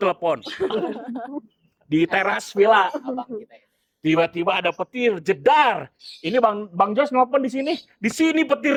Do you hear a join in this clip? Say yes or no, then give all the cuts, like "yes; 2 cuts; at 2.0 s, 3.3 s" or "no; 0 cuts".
no; 0 cuts